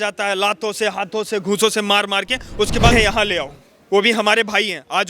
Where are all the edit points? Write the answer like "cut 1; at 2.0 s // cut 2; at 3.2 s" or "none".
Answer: cut 1; at 2.9 s